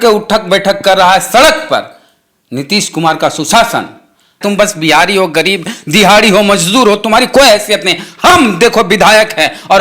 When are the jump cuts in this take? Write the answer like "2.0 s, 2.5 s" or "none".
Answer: 4.4 s